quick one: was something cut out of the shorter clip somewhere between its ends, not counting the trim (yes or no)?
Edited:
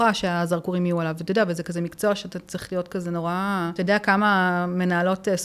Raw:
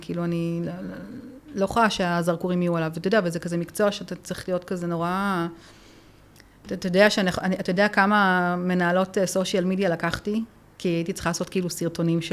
yes